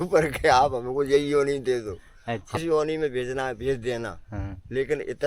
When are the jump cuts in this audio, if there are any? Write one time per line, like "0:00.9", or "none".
0:02.5

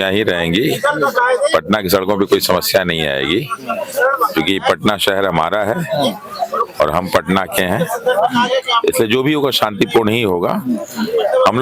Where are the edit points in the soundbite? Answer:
none

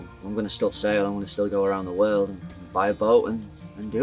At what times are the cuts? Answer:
none

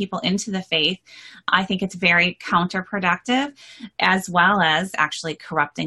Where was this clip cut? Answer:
0:01.5
0:03.9
0:04.9

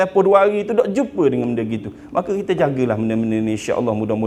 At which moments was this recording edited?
none

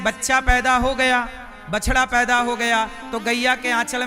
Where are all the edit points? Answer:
none

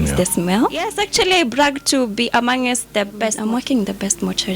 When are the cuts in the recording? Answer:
0:01.0
0:03.4

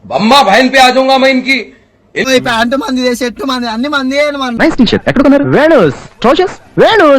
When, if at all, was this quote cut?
0:02.3

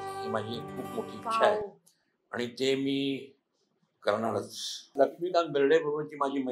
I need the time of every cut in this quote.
0:04.9

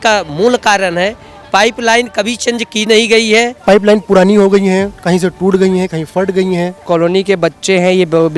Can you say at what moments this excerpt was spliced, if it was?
0:03.6
0:06.8

